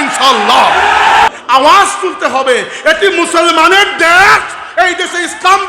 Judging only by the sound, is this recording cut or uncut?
cut